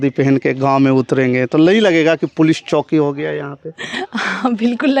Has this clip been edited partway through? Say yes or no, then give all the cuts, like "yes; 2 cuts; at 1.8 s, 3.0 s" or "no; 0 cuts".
no; 0 cuts